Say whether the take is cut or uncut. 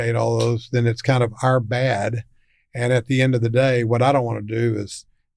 uncut